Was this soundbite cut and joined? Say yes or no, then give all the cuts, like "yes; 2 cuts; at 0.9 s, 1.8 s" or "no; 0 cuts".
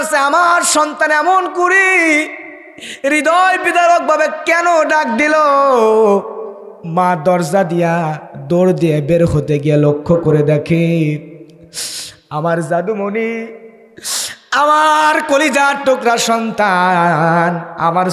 no; 0 cuts